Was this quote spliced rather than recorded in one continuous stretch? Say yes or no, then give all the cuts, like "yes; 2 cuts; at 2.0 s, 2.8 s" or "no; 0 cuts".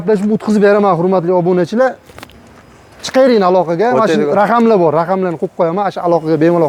no; 0 cuts